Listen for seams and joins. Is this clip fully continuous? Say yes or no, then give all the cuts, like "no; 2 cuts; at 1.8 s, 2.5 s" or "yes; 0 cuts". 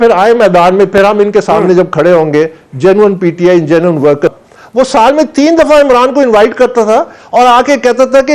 no; 1 cut; at 4.3 s